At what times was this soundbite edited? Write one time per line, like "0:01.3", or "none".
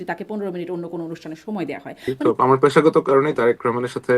0:02.2

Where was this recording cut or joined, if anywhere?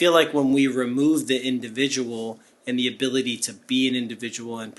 none

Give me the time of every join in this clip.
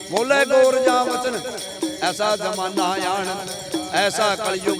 none

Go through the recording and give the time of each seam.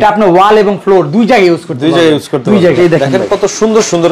0:02.8

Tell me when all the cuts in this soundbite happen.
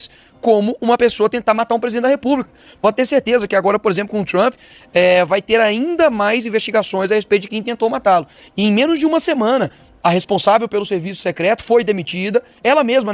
none

